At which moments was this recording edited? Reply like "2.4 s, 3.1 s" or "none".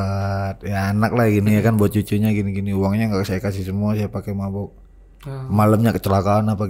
none